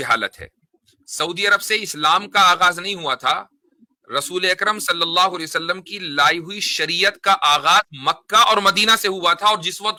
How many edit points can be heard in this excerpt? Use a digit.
0